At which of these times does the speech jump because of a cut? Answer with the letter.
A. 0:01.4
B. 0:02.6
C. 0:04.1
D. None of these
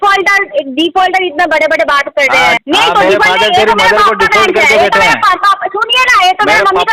B